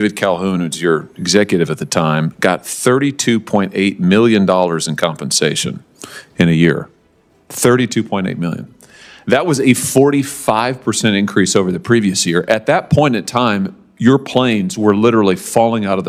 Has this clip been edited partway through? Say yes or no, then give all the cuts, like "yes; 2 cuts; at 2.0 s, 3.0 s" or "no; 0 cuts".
no; 0 cuts